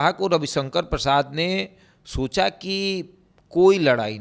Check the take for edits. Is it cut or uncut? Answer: uncut